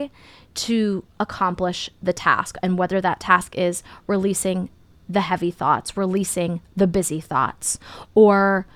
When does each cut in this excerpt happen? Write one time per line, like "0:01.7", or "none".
none